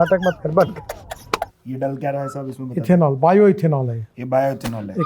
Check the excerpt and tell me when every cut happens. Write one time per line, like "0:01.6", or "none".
0:01.6